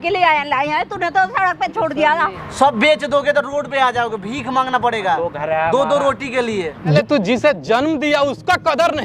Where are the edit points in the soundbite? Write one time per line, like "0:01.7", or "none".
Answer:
0:02.4
0:06.9